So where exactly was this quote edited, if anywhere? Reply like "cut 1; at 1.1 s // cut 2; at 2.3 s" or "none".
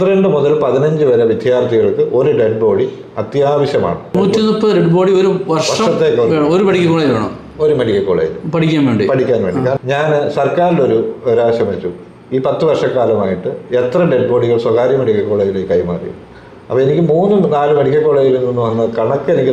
cut 1; at 4.0 s // cut 2; at 9.8 s